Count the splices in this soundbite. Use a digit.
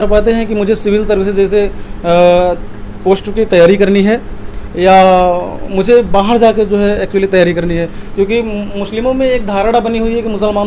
0